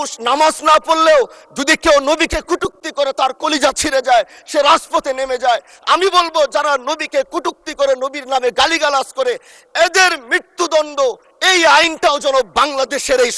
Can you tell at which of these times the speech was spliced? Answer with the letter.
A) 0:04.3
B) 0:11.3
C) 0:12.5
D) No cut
D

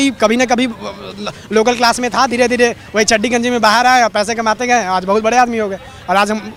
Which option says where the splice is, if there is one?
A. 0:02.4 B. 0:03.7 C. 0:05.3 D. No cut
D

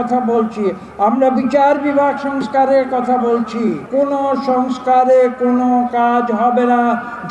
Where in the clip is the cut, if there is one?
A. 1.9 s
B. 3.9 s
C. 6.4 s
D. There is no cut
B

